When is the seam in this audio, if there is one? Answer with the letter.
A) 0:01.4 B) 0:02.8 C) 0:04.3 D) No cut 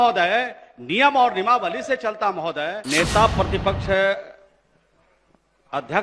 B